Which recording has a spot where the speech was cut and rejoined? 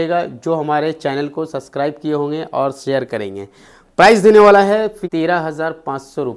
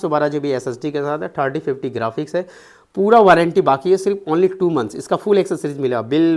first; 1 cut; at 5.0 s

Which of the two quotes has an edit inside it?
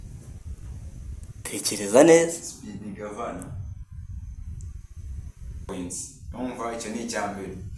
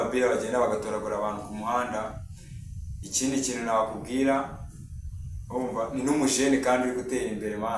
first; 1 cut; at 5.7 s

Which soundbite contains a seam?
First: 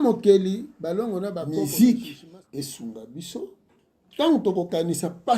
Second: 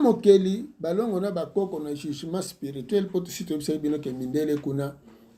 first; 1 cut; at 1.5 s

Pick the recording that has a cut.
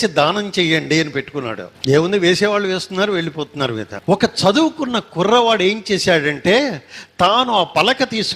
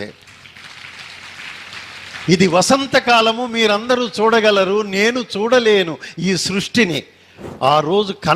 first; 2 cuts; at 1.7 s, 3.9 s

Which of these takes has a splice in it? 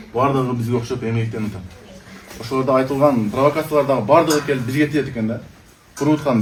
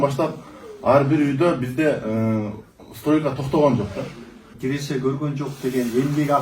second; 1 cut; at 4.5 s

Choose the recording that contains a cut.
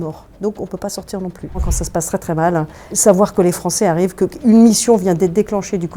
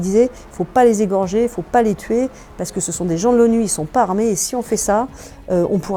first; 2 cuts; at 1.7 s, 2.9 s

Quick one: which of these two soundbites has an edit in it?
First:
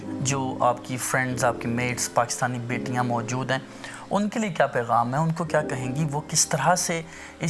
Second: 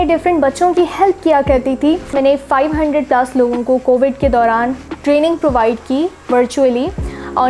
second; 1 cut; at 2.1 s

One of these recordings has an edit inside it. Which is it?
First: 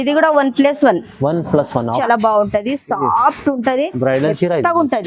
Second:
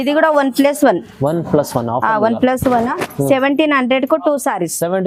first; 1 cut; at 2.0 s

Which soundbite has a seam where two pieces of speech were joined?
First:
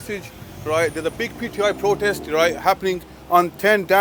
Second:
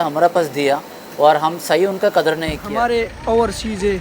second; 1 cut; at 2.6 s

